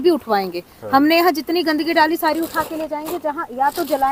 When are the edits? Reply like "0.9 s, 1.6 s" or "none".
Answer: none